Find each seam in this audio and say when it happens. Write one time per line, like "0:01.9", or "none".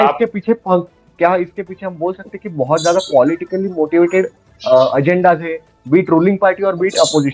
none